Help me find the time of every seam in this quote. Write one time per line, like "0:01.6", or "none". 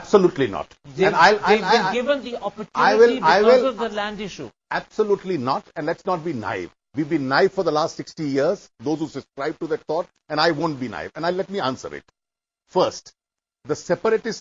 0:07.6